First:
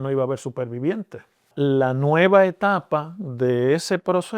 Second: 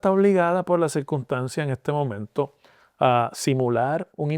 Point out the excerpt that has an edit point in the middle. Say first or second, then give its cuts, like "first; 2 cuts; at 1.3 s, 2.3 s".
first; 1 cut; at 1.5 s